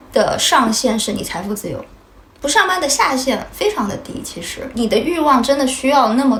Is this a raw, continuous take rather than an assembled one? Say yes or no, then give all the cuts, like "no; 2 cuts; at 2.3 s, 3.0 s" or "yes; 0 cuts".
yes; 0 cuts